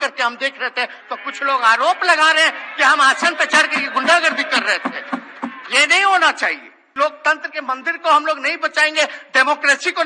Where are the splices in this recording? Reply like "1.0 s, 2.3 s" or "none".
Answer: 6.8 s

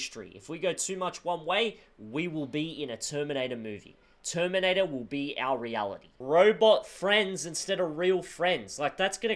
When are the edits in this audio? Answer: 6.1 s

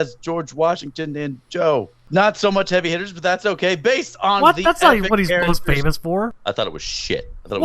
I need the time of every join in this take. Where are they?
2.0 s, 6.4 s

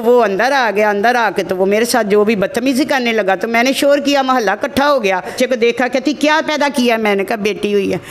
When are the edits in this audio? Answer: 5.3 s

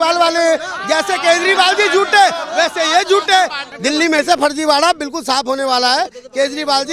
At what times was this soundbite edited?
3.7 s

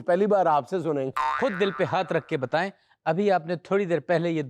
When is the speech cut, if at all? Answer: 1.3 s

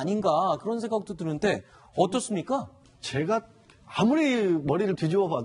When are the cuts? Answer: 4.2 s

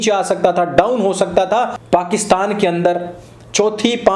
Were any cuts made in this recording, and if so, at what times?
1.8 s

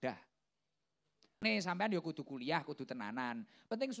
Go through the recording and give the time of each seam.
1.4 s

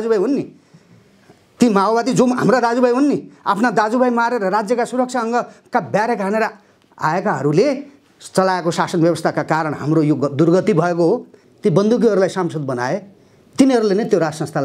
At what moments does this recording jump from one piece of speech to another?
11.4 s

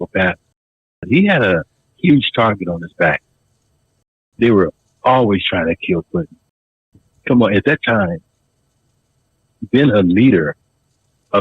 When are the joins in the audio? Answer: 1.0 s

